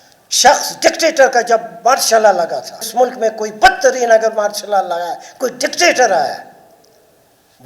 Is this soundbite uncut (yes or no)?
no